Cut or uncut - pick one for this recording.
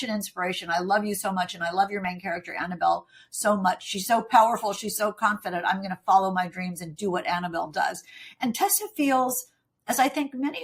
uncut